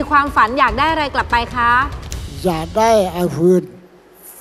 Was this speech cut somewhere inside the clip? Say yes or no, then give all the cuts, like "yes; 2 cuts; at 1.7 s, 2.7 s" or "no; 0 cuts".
no; 0 cuts